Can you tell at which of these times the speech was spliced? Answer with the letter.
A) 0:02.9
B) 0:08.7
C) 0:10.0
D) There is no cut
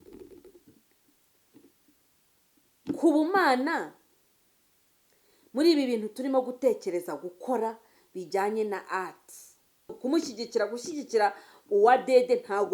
C